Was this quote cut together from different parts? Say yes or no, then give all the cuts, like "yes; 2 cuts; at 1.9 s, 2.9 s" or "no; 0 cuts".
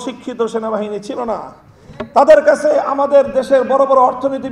no; 0 cuts